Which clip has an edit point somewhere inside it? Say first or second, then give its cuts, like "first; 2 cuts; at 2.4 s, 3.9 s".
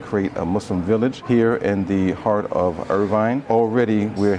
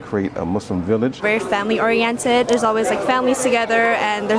second; 1 cut; at 1.2 s